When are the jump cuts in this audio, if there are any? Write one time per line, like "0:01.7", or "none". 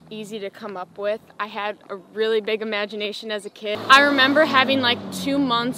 0:03.8